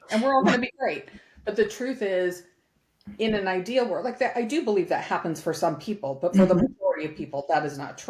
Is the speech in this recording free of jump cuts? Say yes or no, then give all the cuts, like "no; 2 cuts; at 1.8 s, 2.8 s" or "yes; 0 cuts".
yes; 0 cuts